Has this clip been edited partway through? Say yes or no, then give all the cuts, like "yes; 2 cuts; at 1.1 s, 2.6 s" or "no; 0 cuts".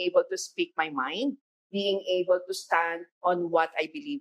yes; 2 cuts; at 1.4 s, 3.0 s